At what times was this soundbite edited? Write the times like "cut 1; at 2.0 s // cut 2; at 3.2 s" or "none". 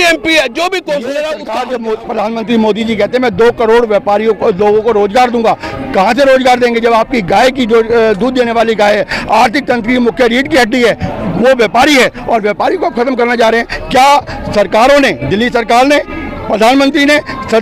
cut 1; at 1.5 s